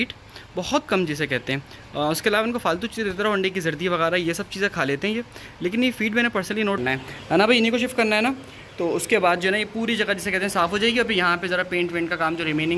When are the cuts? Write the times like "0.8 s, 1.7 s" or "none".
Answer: 6.8 s